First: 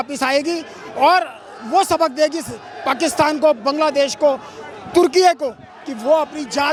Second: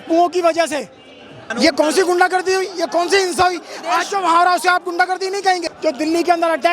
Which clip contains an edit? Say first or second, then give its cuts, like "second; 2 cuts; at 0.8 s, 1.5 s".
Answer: second; 2 cuts; at 1.4 s, 5.7 s